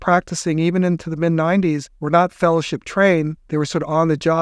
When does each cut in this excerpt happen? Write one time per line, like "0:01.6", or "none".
0:01.9
0:03.4